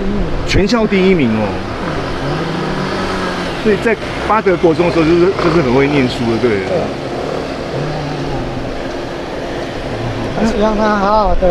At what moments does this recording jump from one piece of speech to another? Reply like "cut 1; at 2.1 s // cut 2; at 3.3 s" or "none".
none

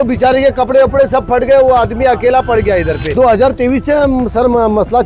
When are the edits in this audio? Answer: cut 1; at 3.1 s

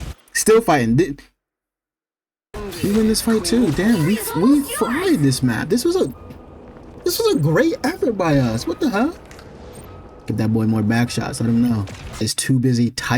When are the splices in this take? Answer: cut 1; at 2.5 s // cut 2; at 12.0 s

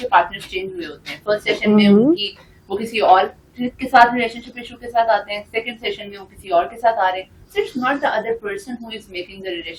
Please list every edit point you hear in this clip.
none

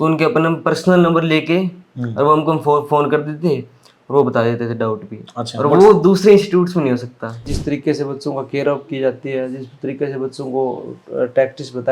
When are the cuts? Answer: cut 1; at 7.5 s

